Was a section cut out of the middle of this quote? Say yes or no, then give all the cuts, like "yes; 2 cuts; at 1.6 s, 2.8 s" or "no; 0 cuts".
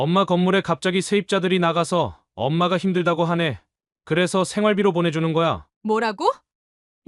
no; 0 cuts